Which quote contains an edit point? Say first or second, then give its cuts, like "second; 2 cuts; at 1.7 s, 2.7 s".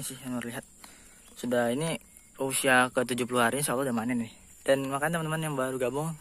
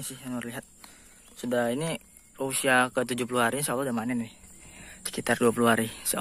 first; 1 cut; at 4.4 s